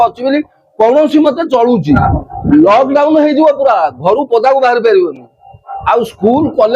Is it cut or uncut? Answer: cut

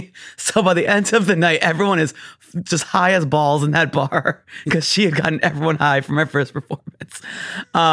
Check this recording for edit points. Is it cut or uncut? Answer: uncut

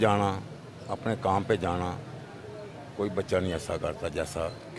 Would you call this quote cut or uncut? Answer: uncut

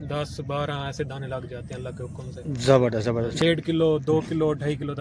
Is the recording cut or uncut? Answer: cut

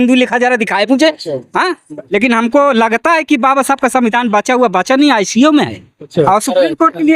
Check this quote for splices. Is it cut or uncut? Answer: cut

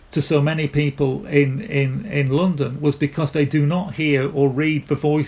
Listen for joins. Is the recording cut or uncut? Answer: uncut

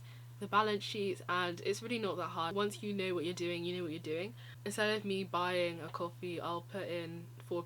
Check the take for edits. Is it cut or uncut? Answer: cut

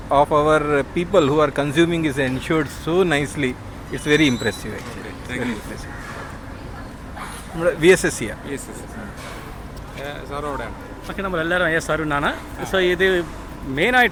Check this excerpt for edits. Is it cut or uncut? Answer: uncut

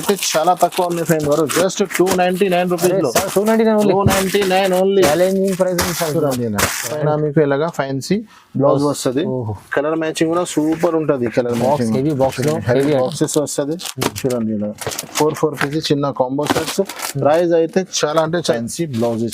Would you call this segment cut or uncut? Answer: cut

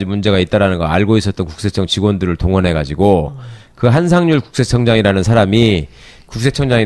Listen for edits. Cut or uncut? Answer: uncut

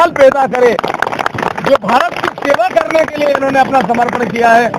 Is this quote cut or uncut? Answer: uncut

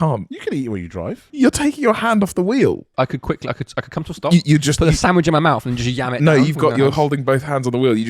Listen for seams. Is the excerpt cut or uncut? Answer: cut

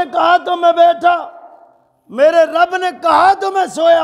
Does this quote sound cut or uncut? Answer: uncut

